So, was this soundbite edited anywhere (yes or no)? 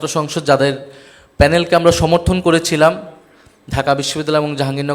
no